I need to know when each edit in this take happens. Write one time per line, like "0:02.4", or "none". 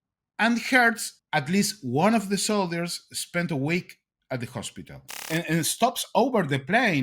0:01.1
0:05.2